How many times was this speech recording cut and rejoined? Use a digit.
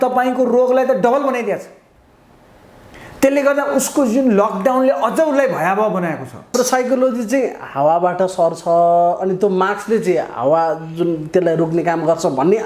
1